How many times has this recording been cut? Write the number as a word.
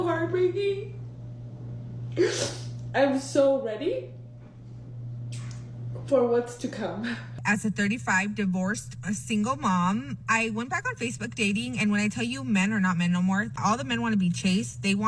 two